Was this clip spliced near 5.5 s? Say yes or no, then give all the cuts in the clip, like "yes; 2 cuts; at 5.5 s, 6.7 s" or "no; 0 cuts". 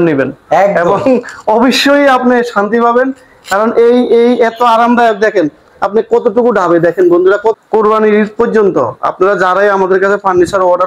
no; 1 cut; at 7.6 s